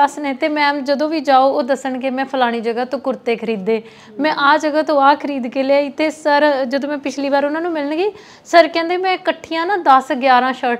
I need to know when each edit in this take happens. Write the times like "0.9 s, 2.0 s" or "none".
none